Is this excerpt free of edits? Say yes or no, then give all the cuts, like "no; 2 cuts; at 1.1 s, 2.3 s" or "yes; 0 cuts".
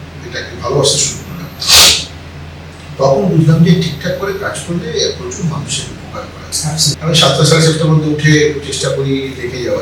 no; 1 cut; at 7.0 s